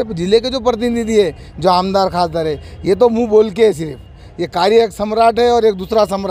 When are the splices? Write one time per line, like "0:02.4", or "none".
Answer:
none